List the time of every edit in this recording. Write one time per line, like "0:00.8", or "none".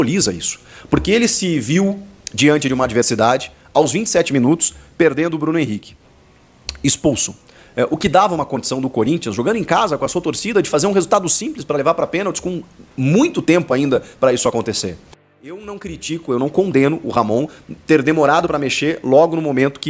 0:15.3